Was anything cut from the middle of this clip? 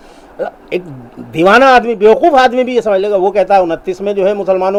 no; 0 cuts

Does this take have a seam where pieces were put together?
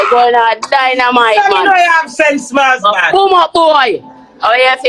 no; 0 cuts

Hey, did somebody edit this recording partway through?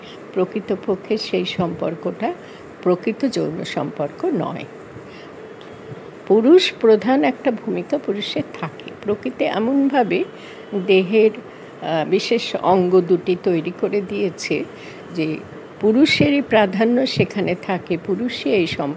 no; 0 cuts

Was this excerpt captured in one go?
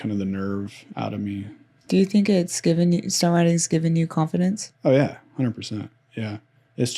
yes; 0 cuts

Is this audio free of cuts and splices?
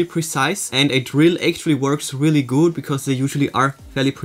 yes; 0 cuts

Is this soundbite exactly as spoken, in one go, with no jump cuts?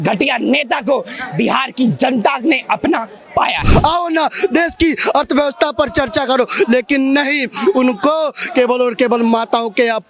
no; 1 cut; at 3.7 s

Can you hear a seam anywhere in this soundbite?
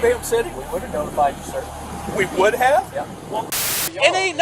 yes; 1 cut; at 3.5 s

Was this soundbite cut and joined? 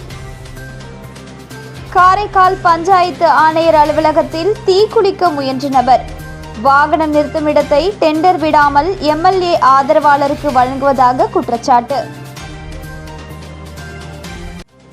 yes; 1 cut; at 1.9 s

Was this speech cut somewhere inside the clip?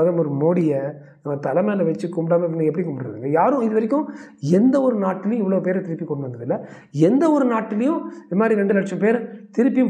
no; 0 cuts

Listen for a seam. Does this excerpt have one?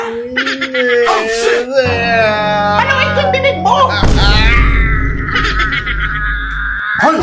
no; 0 cuts

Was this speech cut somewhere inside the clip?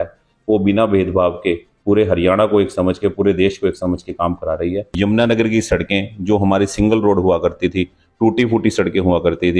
yes; 1 cut; at 4.9 s

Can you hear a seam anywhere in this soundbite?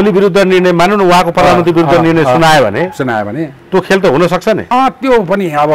no; 0 cuts

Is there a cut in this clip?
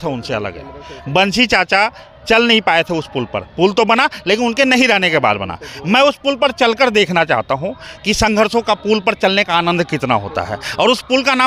no; 0 cuts

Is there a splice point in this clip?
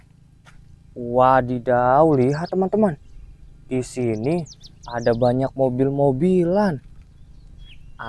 no; 0 cuts

